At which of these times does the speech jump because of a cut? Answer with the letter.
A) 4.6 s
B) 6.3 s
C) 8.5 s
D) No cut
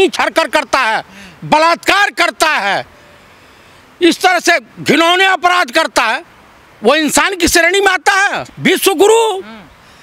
C